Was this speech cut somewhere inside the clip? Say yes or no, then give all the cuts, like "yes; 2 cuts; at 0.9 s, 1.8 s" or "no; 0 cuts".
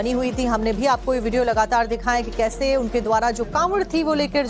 no; 0 cuts